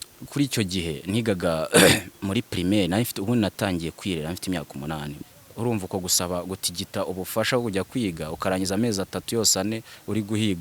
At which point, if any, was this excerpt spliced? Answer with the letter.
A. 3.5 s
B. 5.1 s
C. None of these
B